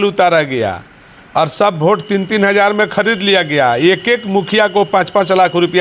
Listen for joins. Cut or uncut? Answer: uncut